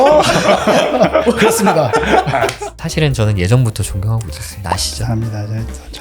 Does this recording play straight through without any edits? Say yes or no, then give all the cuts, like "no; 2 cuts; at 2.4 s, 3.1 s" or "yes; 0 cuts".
no; 1 cut; at 2.5 s